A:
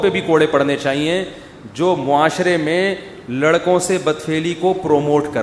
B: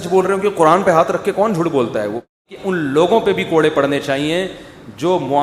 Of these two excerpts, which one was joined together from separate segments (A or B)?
B